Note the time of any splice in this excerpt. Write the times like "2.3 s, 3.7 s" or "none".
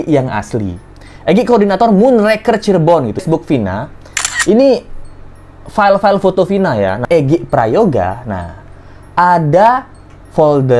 3.2 s, 7.0 s

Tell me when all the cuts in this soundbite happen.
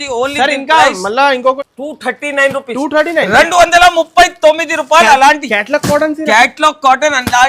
1.6 s

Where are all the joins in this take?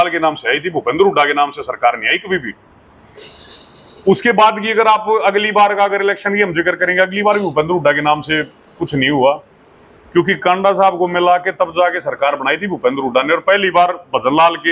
none

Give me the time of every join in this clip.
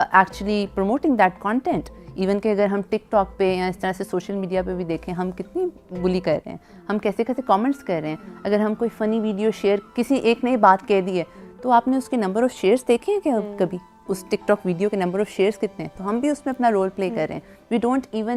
none

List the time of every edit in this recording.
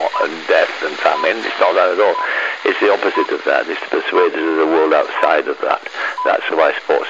none

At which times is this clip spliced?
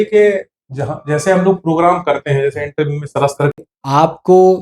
3.6 s

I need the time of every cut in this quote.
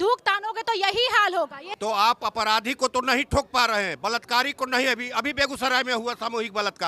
1.6 s

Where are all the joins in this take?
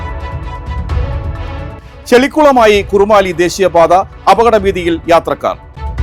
none

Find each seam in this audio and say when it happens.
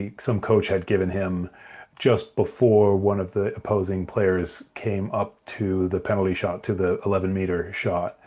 none

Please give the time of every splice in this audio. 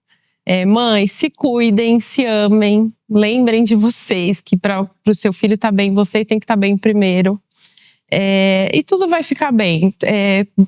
none

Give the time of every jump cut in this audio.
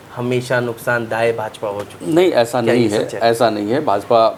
none

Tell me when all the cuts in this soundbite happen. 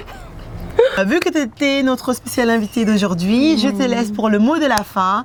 none

